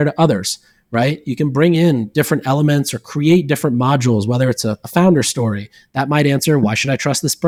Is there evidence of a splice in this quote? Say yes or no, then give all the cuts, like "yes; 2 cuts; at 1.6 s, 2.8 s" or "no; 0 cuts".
no; 0 cuts